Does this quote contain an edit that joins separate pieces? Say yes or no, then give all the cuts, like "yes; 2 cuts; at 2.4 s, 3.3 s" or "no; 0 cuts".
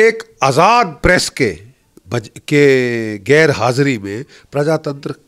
no; 0 cuts